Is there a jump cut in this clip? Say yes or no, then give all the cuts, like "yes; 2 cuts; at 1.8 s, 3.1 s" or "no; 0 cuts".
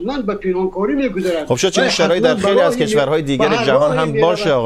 no; 0 cuts